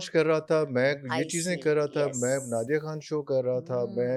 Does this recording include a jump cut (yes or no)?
no